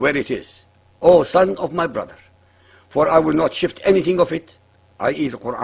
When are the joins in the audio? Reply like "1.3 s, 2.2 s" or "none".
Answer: 1.3 s